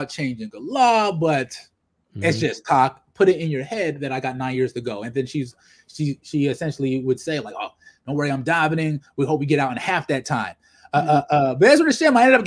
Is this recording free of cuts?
yes; 0 cuts

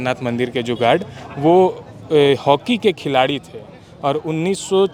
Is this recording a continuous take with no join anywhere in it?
yes; 0 cuts

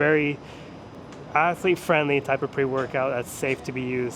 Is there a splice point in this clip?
no; 0 cuts

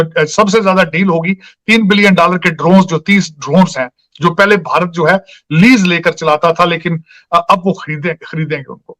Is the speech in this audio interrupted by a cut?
no; 0 cuts

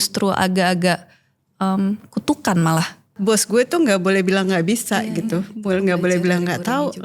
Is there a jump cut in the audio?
yes; 1 cut; at 3.0 s

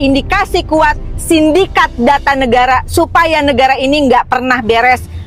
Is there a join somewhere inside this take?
no; 0 cuts

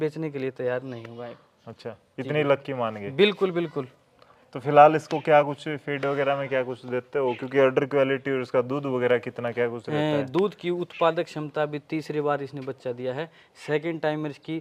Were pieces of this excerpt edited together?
no; 0 cuts

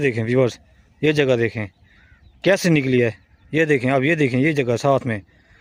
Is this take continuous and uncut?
yes; 0 cuts

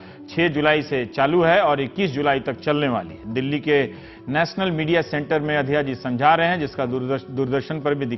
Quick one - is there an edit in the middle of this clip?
yes; 1 cut; at 5.1 s

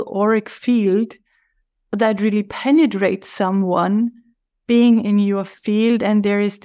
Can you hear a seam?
no; 0 cuts

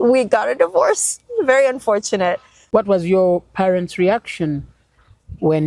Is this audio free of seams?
no; 1 cut; at 2.5 s

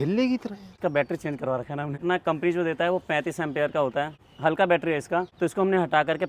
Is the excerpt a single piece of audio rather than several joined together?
no; 4 cuts; at 0.8 s, 2.0 s, 4.2 s, 5.3 s

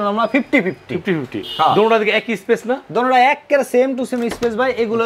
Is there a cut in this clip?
no; 0 cuts

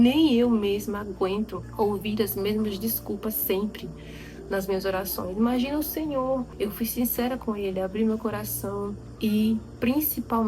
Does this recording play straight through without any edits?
no; 3 cuts; at 1.6 s, 6.5 s, 9.0 s

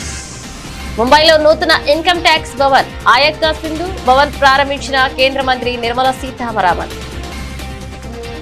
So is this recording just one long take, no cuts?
yes; 0 cuts

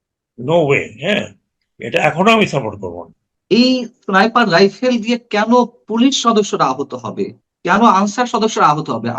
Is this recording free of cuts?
no; 1 cut; at 3.3 s

